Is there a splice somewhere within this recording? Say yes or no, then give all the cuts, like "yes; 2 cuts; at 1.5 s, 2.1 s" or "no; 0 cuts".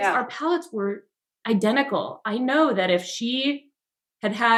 no; 0 cuts